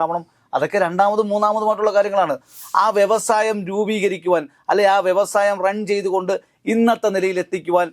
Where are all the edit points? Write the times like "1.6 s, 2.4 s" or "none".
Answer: 2.5 s